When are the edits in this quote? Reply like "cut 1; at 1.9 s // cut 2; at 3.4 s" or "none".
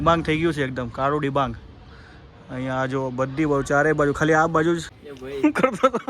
cut 1; at 5.0 s